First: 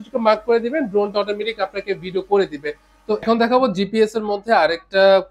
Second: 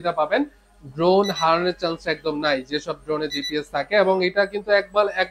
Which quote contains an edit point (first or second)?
first